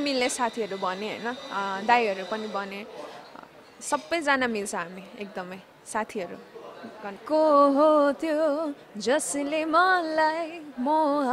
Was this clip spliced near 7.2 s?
yes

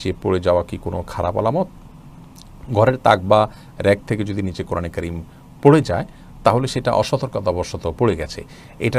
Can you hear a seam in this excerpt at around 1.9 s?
no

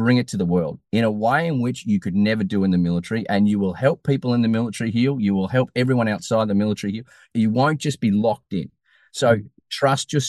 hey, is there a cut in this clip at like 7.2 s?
yes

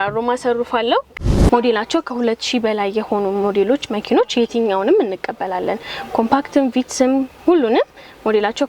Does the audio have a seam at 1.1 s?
yes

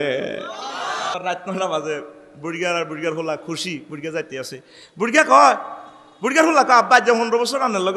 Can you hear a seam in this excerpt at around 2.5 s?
no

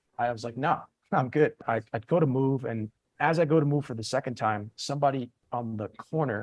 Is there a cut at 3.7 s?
no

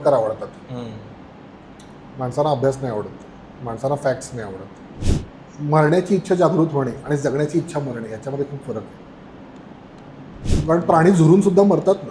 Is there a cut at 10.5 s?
yes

